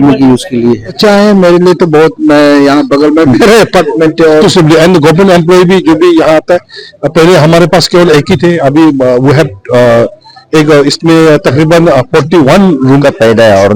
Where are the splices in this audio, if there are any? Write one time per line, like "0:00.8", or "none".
0:01.0
0:04.4
0:12.8